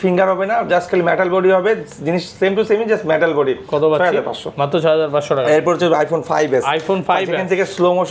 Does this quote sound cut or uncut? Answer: uncut